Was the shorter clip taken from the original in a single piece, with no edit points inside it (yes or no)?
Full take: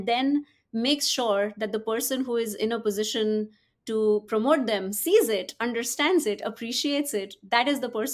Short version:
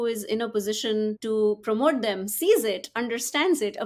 no